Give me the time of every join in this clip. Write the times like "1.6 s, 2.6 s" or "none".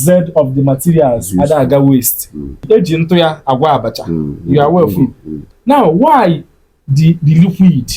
2.6 s, 5.4 s